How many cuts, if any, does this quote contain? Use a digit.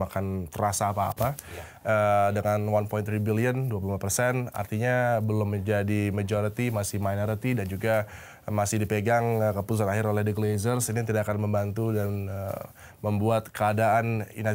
0